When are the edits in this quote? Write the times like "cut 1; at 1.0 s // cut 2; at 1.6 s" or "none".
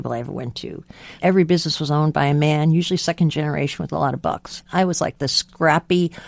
cut 1; at 1.2 s // cut 2; at 4.6 s // cut 3; at 5.4 s